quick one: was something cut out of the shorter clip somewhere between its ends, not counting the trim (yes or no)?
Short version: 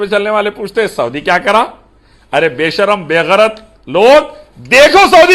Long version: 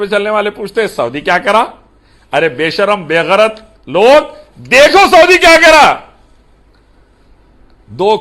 no